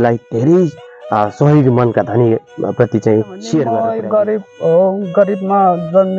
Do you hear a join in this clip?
yes; 1 cut; at 3.9 s

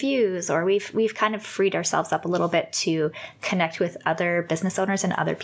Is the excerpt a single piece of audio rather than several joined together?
yes; 0 cuts

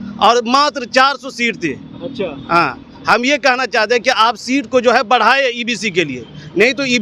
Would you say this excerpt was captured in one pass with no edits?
yes; 0 cuts

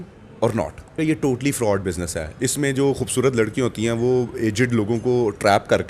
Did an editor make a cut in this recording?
yes; 1 cut; at 1.0 s

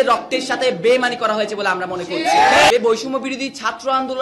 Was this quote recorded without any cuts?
no; 1 cut; at 2.7 s

